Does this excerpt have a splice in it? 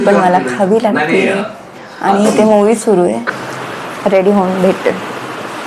yes; 1 cut; at 3.3 s

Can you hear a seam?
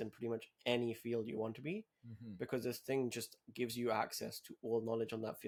no; 0 cuts

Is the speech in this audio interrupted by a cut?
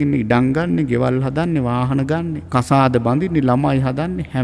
yes; 1 cut; at 2.4 s

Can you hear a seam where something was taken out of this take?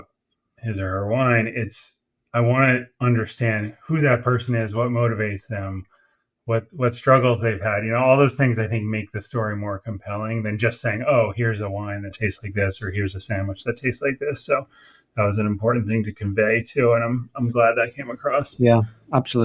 yes; 1 cut; at 18.5 s

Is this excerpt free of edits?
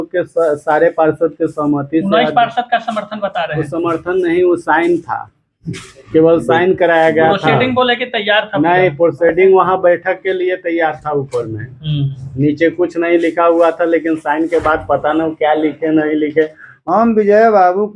no; 1 cut; at 16.7 s

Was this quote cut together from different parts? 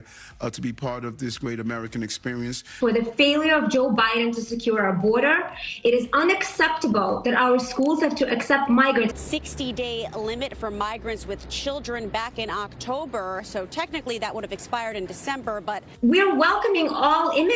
yes; 3 cuts; at 2.7 s, 9.2 s, 15.9 s

